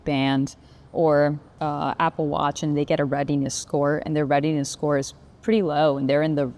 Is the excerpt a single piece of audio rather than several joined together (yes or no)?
no